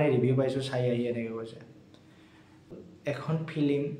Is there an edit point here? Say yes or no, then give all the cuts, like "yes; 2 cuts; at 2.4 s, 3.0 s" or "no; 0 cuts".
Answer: yes; 1 cut; at 2.7 s